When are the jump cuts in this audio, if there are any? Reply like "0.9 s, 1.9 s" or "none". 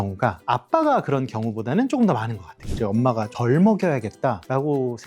2.6 s